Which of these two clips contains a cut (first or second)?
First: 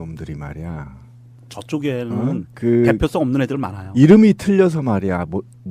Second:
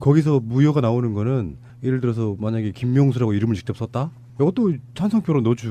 second